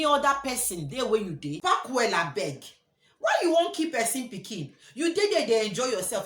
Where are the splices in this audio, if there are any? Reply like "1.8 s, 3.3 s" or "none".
1.6 s